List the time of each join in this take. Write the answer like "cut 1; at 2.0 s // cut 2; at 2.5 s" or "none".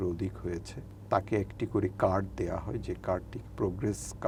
none

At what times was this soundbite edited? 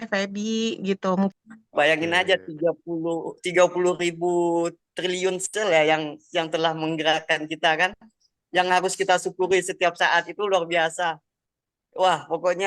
cut 1; at 1.3 s

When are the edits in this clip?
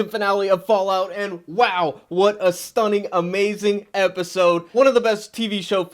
cut 1; at 4.7 s

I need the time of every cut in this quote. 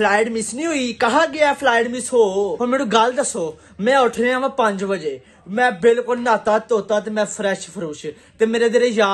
cut 1; at 2.6 s

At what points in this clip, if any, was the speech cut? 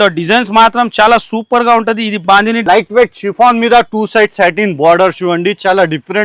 cut 1; at 2.6 s

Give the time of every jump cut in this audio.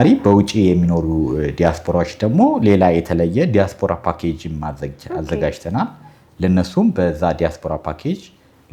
none

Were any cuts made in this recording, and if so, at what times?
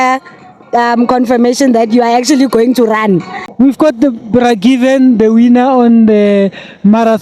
cut 1; at 3.4 s

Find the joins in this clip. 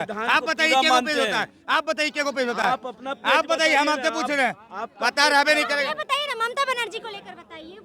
none

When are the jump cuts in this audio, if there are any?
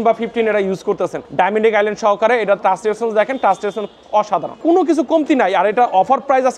cut 1; at 1.2 s // cut 2; at 4.5 s

